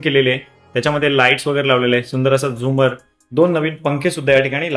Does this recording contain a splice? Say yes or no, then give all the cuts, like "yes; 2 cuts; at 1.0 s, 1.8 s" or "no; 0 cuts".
no; 0 cuts